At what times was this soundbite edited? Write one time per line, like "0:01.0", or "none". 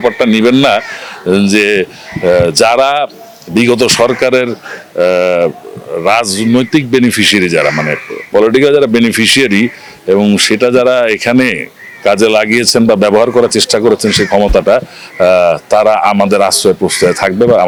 none